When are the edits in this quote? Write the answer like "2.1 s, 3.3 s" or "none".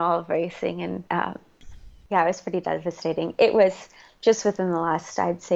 1.7 s